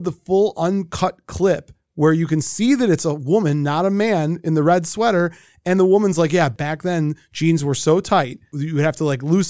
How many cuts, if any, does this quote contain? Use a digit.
1